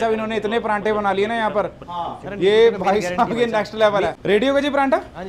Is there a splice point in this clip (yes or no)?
no